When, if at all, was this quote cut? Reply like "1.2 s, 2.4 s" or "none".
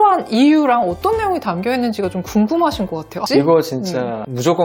3.2 s